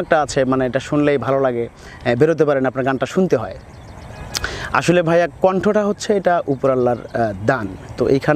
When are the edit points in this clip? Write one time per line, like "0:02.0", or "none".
none